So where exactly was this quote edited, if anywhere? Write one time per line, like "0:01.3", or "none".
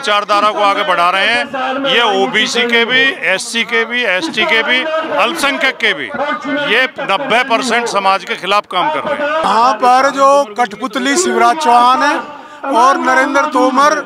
0:09.4

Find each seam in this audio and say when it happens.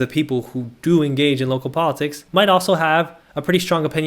0:02.1

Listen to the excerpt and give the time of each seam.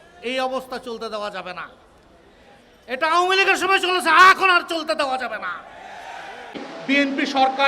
0:06.7

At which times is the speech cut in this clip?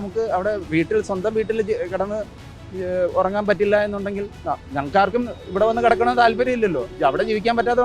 none

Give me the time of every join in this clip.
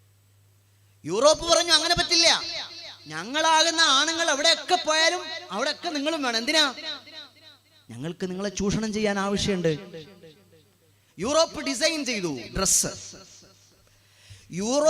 none

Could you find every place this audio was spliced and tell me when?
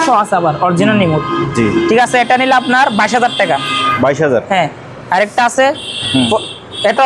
none

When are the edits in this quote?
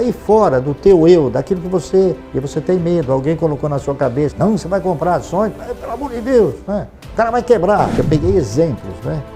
0:02.2
0:08.0

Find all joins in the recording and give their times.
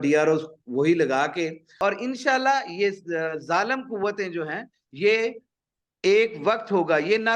0:01.6

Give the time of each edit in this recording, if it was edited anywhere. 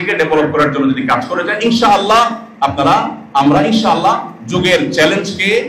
none

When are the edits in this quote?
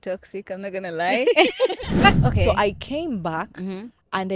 0:02.1

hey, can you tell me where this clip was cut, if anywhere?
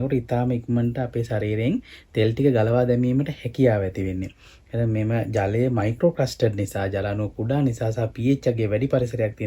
none

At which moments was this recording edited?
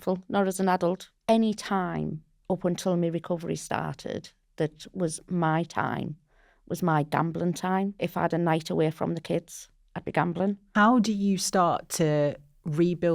0:01.1
0:02.3
0:08.0
0:10.6

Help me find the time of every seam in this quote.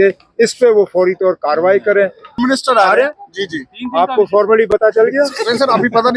0:02.4

